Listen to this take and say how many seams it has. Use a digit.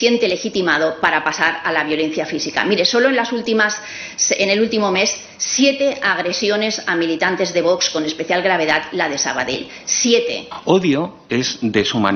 1